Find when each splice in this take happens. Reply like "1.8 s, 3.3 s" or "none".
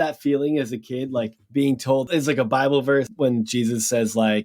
1.9 s, 3.1 s